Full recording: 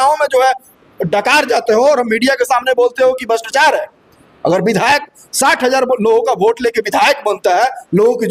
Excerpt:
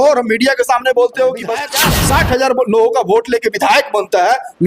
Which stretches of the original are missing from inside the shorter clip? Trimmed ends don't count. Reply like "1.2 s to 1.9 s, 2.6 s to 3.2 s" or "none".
3.5 s to 5.0 s